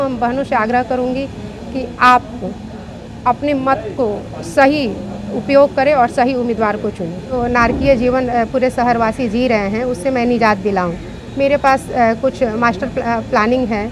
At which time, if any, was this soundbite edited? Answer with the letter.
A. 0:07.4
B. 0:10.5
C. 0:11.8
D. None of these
A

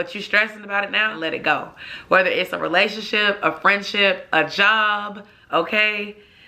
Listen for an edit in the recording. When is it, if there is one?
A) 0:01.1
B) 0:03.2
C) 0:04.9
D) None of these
A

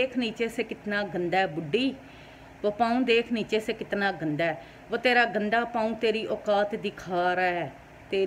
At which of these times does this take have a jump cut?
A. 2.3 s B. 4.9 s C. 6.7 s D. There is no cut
D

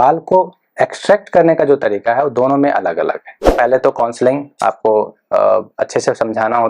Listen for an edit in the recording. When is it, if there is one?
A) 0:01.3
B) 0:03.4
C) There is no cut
B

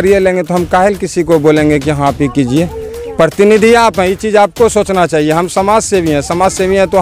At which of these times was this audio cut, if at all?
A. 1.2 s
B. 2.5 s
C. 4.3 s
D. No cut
D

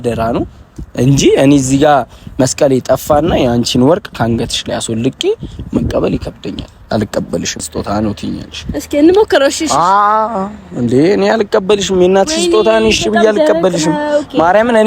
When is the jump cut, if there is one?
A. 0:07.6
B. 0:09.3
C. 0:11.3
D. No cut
A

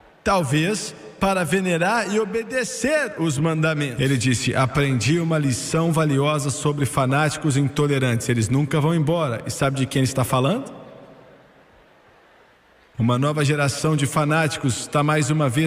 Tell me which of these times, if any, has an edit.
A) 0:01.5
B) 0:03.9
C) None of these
B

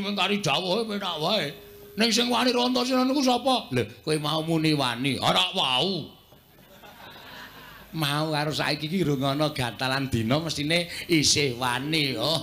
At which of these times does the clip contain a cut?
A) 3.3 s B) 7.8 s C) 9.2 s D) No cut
C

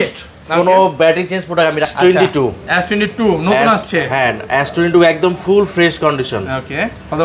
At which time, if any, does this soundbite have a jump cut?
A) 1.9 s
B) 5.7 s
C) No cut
A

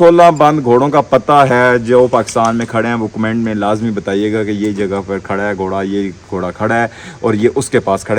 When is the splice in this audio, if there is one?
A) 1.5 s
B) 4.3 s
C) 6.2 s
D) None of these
D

